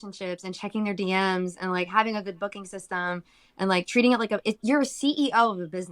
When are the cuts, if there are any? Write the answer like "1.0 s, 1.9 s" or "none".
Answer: none